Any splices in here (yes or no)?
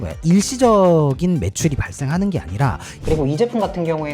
yes